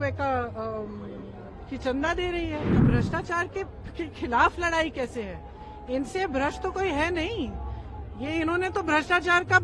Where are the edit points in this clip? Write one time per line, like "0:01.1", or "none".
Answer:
0:02.8

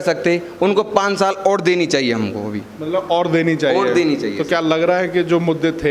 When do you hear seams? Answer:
none

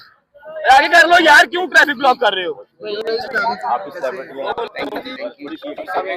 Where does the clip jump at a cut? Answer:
none

